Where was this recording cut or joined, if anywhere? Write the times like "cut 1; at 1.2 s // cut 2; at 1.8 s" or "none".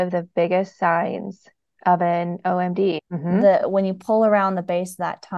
cut 1; at 3.0 s